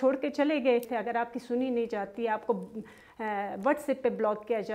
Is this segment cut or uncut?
cut